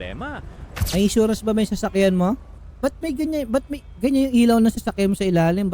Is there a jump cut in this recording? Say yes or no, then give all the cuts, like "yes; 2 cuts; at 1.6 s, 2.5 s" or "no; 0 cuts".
yes; 2 cuts; at 0.8 s, 2.5 s